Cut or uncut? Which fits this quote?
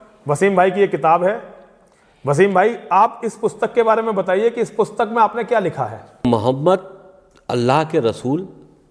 cut